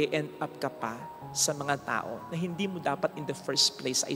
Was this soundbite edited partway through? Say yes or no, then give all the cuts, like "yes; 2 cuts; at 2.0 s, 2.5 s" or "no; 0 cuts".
no; 0 cuts